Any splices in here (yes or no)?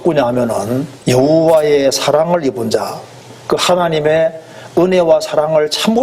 yes